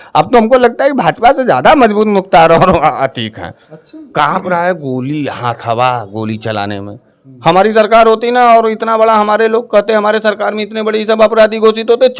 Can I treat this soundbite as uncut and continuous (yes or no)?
yes